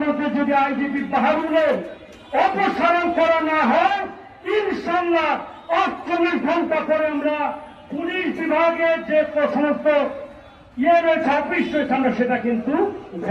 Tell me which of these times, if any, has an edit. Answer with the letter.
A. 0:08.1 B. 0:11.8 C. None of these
C